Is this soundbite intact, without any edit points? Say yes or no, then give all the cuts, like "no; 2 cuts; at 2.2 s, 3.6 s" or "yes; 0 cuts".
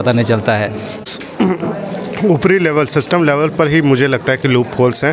no; 1 cut; at 0.9 s